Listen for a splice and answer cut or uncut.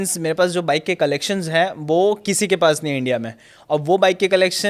uncut